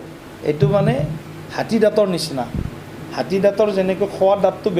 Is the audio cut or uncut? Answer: uncut